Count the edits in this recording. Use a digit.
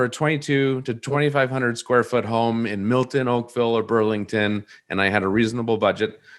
1